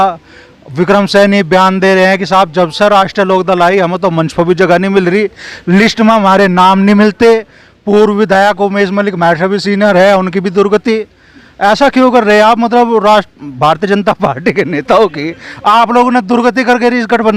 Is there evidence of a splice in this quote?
no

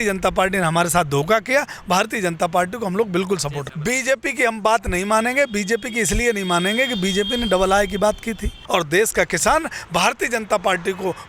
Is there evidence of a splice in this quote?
yes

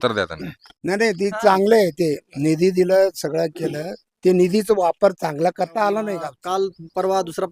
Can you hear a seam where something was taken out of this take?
yes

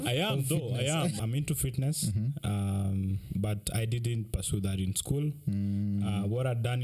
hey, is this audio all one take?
no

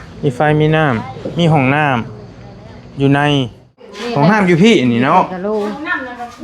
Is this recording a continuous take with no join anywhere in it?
no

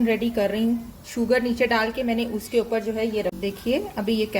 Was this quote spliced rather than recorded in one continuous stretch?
yes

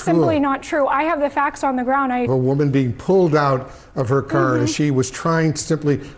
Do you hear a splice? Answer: yes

